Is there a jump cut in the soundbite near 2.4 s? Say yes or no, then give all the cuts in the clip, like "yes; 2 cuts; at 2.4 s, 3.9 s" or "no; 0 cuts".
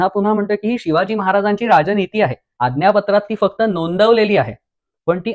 yes; 1 cut; at 2.4 s